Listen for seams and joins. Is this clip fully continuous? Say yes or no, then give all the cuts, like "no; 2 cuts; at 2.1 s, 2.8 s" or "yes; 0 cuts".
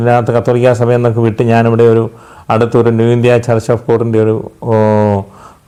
yes; 0 cuts